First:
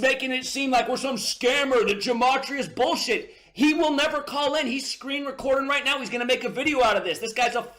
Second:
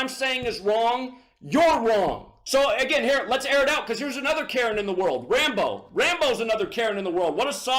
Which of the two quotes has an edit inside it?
second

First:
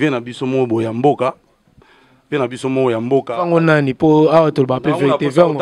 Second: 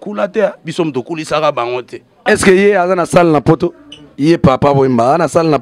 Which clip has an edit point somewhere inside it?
second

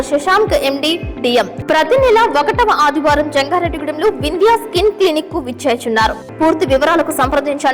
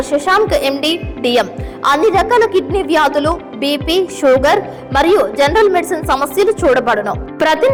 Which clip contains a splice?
first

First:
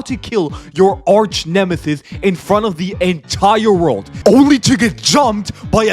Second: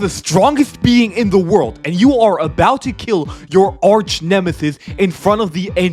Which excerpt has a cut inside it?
first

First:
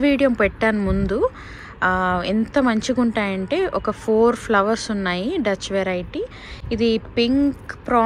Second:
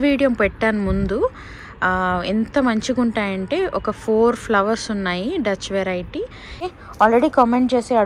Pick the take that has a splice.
second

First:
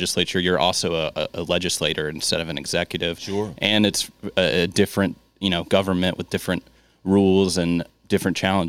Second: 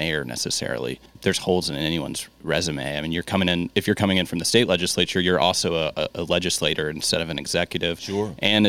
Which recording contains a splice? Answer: second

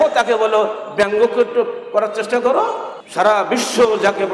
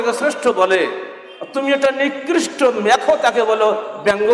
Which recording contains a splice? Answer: first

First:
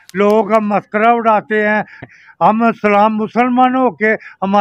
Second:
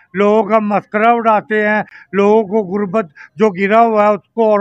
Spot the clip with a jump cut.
first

